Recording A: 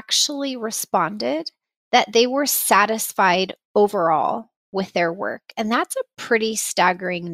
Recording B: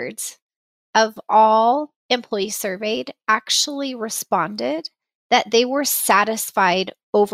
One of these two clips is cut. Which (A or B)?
B